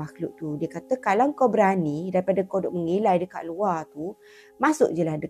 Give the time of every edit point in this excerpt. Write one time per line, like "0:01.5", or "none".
none